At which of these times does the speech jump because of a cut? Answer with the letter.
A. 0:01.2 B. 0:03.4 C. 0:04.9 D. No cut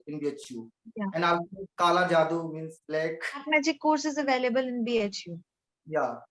B